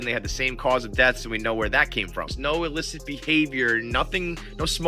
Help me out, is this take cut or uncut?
cut